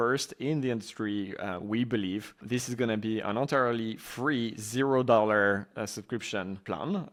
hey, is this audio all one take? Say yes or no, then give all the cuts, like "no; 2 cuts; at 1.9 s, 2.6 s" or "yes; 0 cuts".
yes; 0 cuts